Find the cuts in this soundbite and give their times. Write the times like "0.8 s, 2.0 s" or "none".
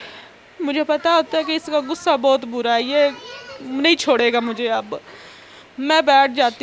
none